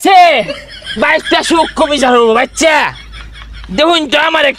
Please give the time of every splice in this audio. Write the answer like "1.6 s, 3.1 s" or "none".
none